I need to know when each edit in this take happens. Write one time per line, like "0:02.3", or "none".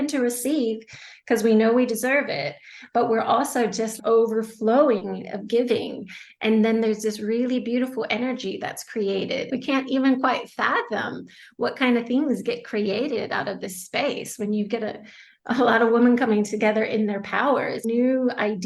0:03.9
0:09.5
0:17.8